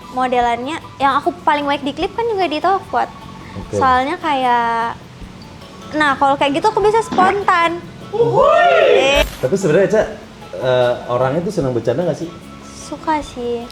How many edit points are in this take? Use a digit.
1